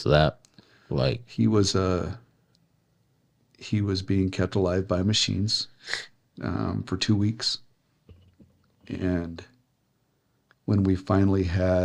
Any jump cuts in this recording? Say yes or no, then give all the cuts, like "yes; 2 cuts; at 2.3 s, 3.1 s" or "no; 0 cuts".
no; 0 cuts